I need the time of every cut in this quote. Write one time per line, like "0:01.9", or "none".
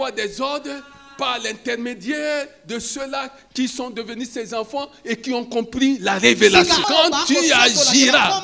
0:06.9